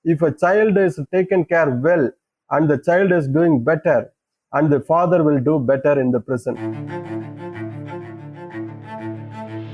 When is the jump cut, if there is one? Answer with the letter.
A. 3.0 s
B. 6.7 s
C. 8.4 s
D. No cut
B